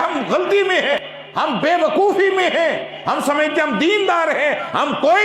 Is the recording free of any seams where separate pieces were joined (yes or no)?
no